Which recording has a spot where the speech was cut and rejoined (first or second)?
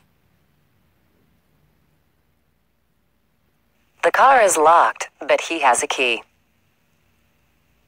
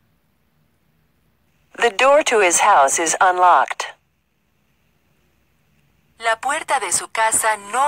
first